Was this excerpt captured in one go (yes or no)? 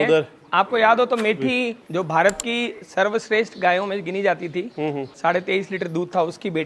no